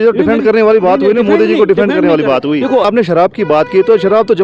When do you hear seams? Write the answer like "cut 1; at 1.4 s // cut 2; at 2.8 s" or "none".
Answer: cut 1; at 2.9 s